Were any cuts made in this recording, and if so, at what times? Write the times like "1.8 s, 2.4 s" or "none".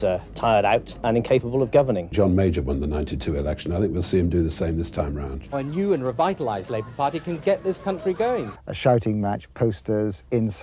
1.0 s, 2.1 s, 5.5 s, 8.5 s